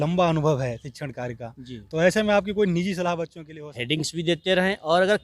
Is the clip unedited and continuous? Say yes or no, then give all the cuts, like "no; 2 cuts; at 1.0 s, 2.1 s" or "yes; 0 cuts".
no; 1 cut; at 3.4 s